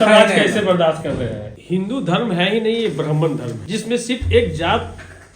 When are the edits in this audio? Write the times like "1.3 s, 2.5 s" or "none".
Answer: 1.5 s, 3.6 s